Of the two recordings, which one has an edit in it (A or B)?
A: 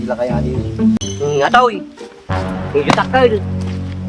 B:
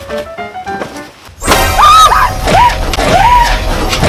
A